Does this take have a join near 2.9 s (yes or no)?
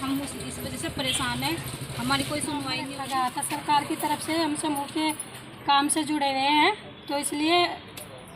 yes